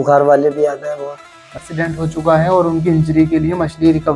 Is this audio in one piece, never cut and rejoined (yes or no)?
no